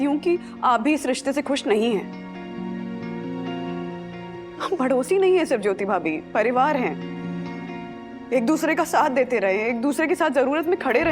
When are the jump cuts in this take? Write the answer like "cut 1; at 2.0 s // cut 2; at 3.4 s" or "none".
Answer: none